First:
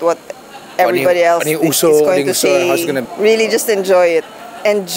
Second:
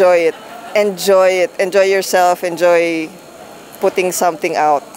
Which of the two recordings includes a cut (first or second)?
first